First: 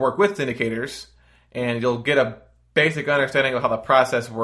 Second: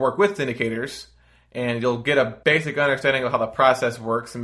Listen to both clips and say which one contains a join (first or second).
second